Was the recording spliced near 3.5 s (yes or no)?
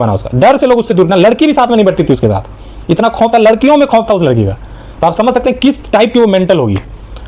no